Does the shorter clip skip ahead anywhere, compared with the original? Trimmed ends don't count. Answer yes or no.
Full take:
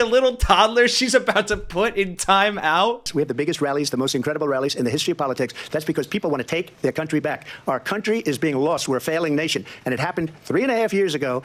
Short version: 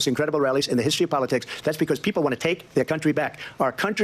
no